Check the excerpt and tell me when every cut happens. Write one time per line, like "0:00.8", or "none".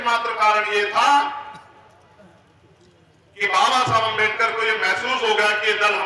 none